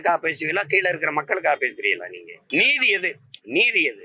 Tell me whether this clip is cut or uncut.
cut